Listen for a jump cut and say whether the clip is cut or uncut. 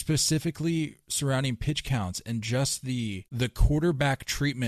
cut